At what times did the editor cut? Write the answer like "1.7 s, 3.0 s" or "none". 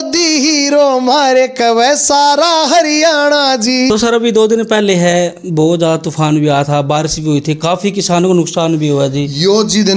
3.9 s